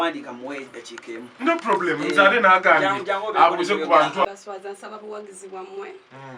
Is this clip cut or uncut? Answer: cut